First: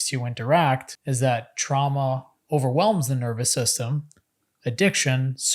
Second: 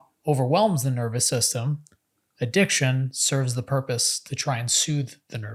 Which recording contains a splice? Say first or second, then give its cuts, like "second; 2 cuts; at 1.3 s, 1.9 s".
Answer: first; 1 cut; at 1.0 s